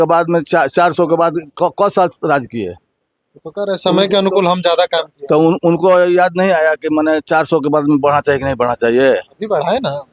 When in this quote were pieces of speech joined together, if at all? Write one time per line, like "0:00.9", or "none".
none